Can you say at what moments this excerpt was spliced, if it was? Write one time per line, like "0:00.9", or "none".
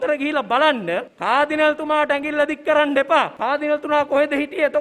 0:01.1
0:03.3